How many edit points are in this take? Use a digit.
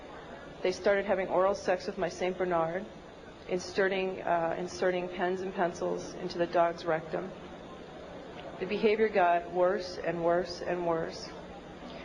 1